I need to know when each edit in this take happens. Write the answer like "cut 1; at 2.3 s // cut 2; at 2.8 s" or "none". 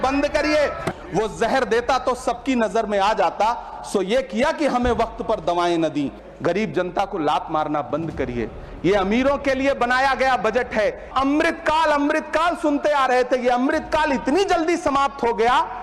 cut 1; at 0.9 s // cut 2; at 6.2 s // cut 3; at 11.1 s